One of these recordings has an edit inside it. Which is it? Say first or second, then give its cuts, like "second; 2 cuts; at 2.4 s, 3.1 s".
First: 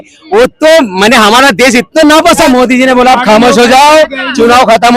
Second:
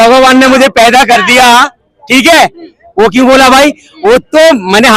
first; 1 cut; at 2.8 s